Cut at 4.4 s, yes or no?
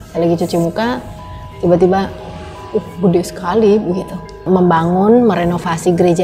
yes